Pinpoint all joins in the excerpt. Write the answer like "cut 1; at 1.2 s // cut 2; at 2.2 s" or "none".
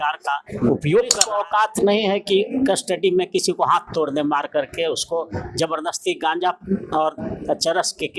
cut 1; at 1.2 s